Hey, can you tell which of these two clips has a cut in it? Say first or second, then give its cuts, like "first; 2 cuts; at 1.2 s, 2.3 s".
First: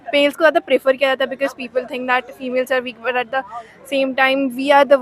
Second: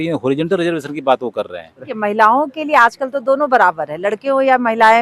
second; 1 cut; at 1.9 s